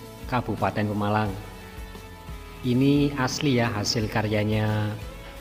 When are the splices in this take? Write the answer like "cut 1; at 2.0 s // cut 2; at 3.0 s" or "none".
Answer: none